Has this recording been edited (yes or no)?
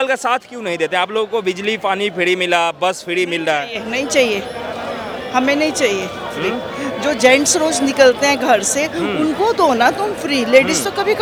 no